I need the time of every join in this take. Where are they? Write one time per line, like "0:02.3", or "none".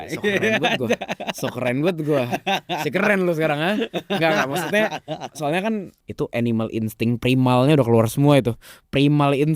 0:06.0